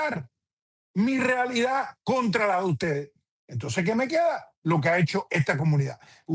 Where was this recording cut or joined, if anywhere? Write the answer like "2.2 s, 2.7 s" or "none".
none